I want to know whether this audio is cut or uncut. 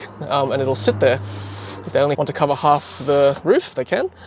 uncut